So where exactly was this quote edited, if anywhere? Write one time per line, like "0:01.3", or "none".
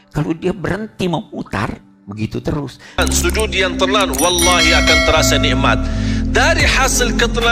0:03.0